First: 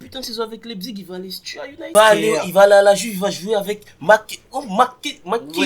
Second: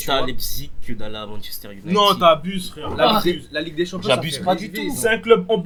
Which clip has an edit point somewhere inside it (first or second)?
first